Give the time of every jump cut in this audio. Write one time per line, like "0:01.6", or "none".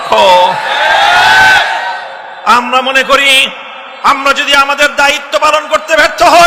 none

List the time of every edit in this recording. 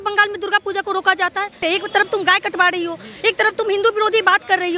0:01.6

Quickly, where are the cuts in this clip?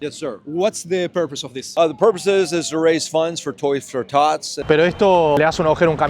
0:04.6

